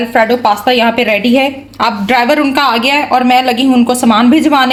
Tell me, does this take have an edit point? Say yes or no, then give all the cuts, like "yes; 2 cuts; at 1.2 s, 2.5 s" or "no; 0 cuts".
no; 0 cuts